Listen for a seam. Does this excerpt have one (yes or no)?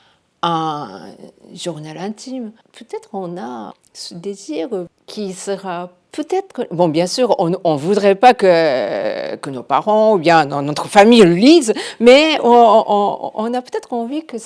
yes